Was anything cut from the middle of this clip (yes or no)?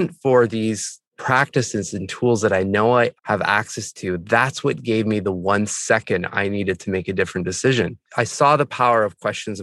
yes